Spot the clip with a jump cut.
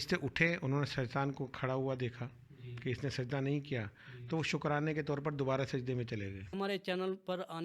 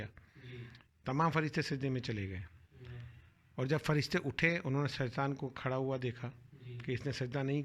first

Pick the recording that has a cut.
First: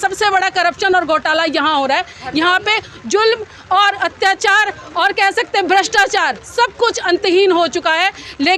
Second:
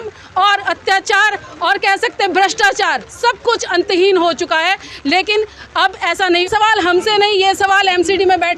second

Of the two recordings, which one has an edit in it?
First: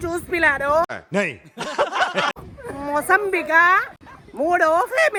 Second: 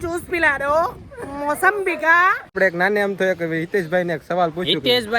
second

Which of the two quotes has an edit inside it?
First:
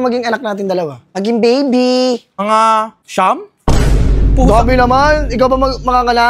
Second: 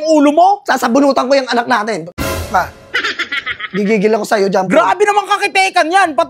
first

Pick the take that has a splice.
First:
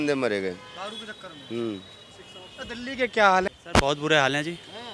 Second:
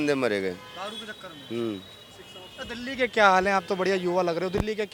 first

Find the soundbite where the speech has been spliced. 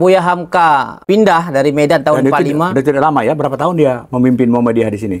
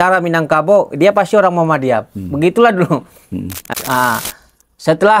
second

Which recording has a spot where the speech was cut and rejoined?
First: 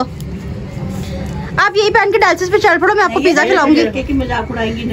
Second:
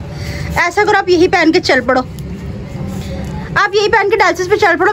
first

